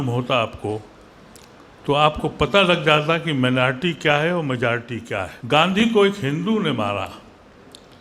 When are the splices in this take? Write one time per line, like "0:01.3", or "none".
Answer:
0:05.3